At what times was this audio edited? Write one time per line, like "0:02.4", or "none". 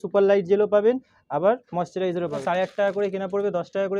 0:02.4